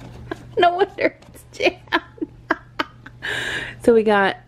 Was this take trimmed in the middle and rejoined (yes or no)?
no